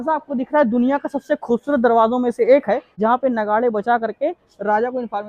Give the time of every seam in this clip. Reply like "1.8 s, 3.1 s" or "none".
2.9 s